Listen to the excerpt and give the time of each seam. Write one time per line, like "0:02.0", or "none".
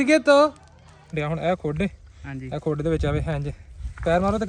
0:01.2